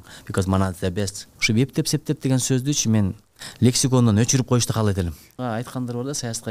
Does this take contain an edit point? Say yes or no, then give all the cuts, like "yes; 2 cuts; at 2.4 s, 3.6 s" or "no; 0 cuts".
yes; 2 cuts; at 1.2 s, 5.4 s